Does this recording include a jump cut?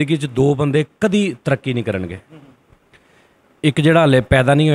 no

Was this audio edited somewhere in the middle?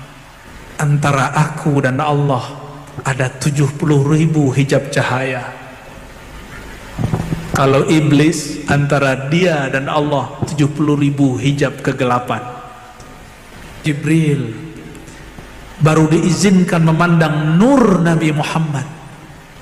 yes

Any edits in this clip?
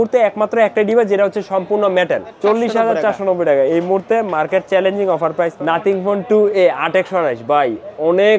yes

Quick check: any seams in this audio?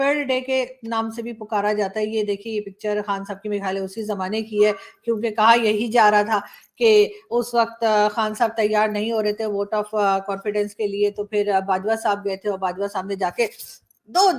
no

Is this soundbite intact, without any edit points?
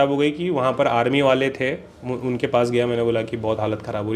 yes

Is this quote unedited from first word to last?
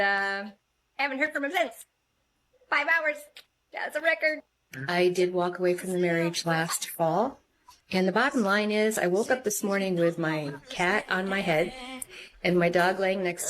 no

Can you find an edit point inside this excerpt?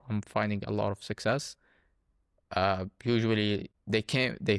no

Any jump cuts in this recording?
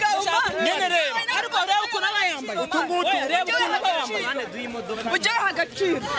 no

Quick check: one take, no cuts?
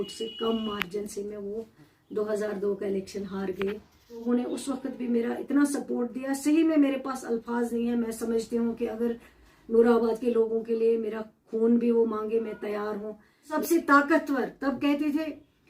no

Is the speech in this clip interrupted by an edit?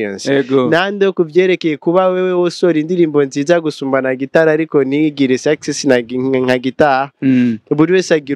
no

